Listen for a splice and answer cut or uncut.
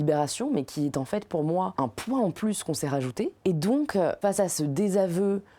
cut